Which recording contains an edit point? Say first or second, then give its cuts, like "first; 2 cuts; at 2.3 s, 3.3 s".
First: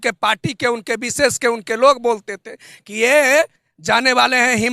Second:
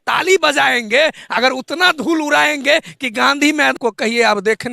second; 1 cut; at 3.7 s